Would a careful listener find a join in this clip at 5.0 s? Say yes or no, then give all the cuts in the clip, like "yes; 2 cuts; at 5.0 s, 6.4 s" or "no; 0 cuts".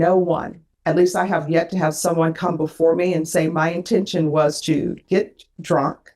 no; 0 cuts